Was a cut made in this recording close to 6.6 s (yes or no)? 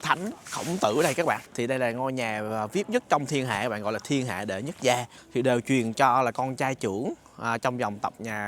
no